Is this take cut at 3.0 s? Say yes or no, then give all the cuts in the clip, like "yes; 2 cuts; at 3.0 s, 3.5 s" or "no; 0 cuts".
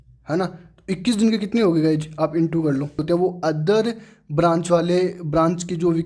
yes; 1 cut; at 3.0 s